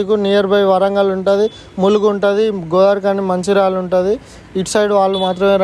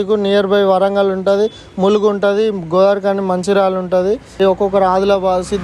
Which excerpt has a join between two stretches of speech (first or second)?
second